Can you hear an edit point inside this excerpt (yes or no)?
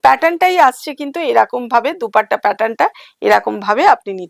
no